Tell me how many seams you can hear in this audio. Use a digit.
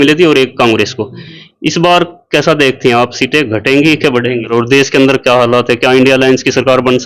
1